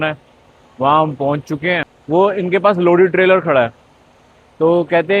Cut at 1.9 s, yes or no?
yes